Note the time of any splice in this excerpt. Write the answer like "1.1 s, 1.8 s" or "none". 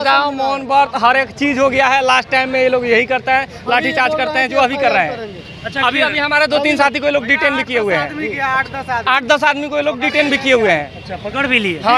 none